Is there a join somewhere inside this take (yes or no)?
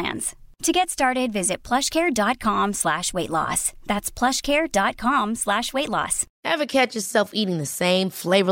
yes